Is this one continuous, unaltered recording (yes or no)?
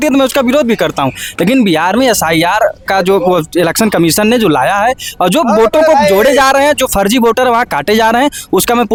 yes